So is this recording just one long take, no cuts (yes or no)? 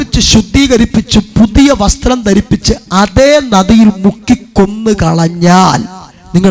yes